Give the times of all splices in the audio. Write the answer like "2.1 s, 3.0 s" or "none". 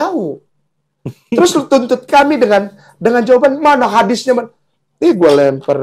none